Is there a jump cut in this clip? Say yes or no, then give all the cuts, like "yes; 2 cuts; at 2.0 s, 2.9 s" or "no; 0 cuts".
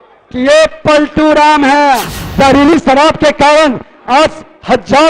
yes; 1 cut; at 2.2 s